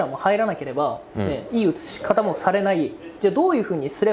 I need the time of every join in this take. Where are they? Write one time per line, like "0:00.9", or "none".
none